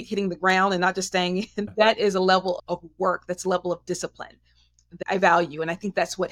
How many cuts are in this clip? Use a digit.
2